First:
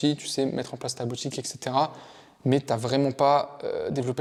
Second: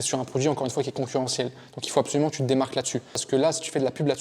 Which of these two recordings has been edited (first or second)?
second